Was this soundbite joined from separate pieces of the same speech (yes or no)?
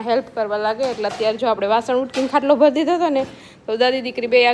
no